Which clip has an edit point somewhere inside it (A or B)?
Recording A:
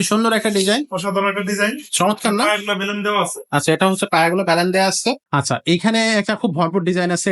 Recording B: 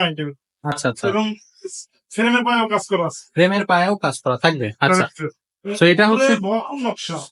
A